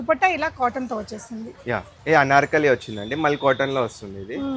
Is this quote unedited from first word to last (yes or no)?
no